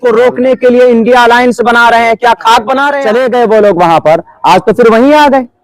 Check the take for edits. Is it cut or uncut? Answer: cut